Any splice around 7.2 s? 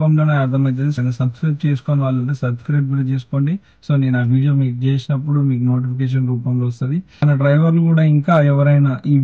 yes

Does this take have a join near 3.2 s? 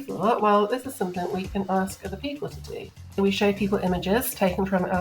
yes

